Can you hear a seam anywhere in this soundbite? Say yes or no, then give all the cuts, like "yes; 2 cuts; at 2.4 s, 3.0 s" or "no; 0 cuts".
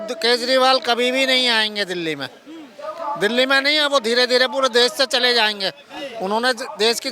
no; 0 cuts